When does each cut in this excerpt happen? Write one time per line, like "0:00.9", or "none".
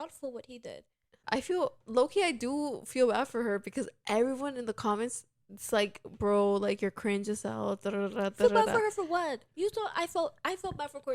0:01.2